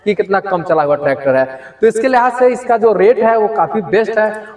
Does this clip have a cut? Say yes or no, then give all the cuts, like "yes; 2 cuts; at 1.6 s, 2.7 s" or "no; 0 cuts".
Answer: no; 0 cuts